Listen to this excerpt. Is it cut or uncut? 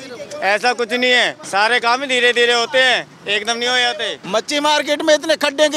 cut